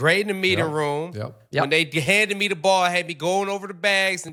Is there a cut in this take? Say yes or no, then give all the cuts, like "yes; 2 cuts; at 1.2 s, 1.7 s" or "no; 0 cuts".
no; 0 cuts